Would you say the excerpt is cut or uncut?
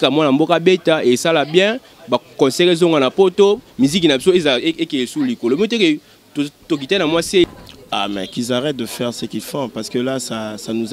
cut